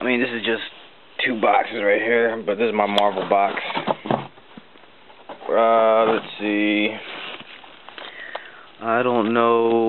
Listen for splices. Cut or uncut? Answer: uncut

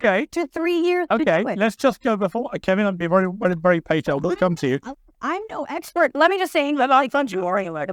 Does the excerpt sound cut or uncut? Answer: uncut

